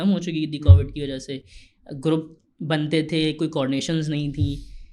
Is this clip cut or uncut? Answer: uncut